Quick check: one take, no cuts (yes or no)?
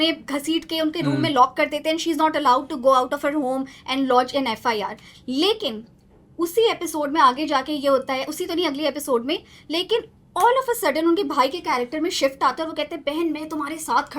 yes